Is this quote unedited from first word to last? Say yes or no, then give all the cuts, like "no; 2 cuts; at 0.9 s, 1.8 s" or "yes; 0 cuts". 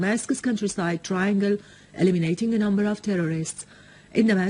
no; 1 cut; at 2.8 s